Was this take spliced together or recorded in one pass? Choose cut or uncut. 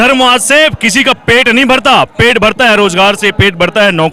uncut